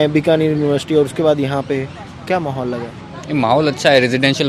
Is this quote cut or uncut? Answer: uncut